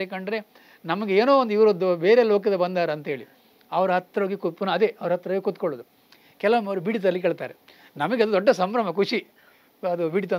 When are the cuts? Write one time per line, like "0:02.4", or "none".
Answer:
none